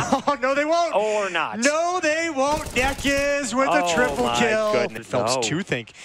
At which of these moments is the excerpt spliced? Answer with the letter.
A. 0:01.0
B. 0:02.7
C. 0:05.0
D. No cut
C